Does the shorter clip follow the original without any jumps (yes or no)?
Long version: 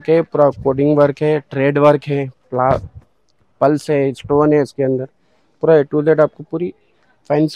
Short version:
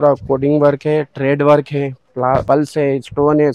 no